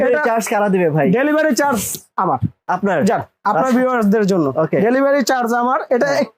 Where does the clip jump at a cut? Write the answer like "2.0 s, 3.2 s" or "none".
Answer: none